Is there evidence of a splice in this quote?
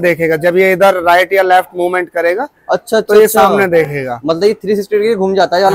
no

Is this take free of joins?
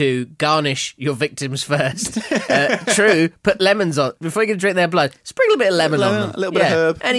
yes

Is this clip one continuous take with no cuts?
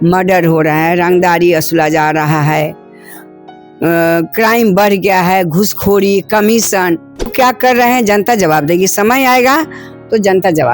no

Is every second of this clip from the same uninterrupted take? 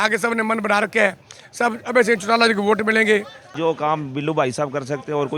no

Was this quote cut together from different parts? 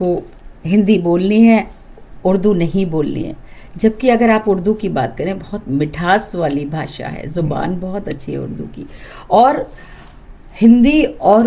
no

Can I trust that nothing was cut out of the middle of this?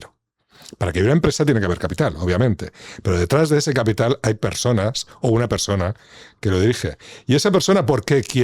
yes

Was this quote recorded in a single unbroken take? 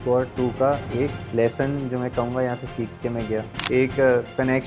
no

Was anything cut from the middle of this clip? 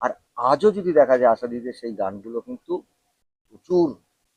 no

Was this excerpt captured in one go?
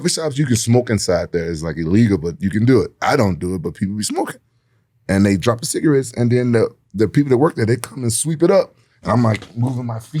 yes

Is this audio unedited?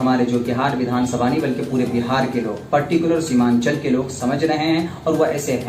yes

